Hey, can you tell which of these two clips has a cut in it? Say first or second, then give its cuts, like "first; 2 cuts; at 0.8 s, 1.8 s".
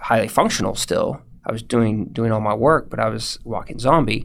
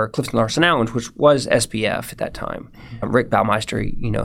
second; 1 cut; at 3.0 s